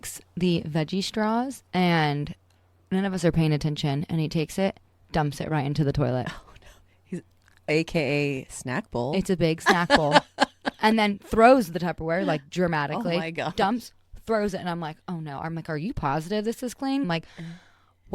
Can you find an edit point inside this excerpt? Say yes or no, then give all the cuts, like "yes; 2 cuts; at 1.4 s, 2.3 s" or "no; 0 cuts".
yes; 2 cuts; at 1.6 s, 17.0 s